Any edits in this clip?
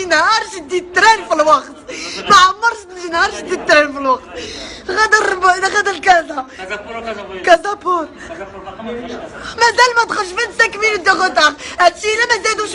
no; 0 cuts

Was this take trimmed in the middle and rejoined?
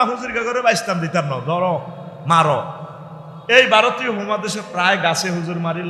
no; 0 cuts

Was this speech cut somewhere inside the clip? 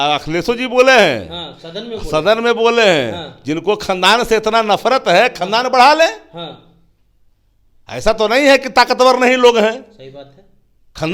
no; 0 cuts

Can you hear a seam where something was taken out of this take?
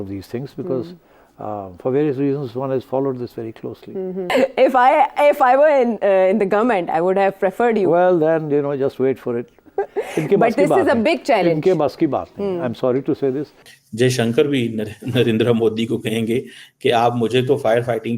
no; 0 cuts

